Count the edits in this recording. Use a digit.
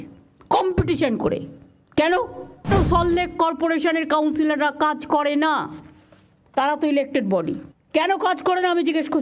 2